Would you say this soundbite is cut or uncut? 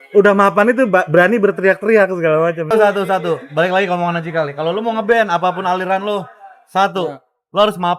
cut